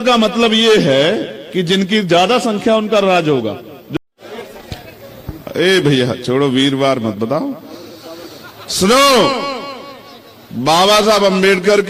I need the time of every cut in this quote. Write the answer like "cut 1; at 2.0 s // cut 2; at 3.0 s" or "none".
cut 1; at 3.8 s